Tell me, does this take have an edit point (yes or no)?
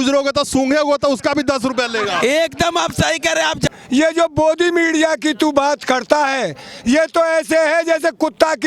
yes